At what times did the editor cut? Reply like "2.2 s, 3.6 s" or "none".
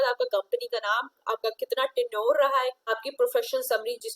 2.9 s